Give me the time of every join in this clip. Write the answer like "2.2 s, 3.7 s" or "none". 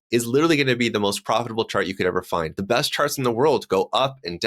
2.5 s